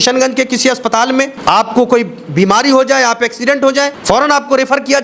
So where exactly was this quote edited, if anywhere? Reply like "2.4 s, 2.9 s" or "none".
1.3 s, 4.0 s